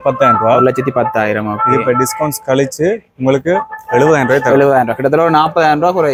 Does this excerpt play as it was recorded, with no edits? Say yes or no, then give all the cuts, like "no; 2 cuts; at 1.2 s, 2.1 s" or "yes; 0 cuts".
yes; 0 cuts